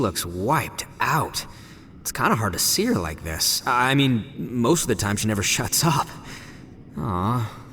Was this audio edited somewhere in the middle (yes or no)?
no